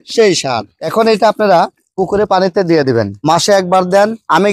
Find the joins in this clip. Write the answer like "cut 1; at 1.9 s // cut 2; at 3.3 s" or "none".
cut 1; at 3.1 s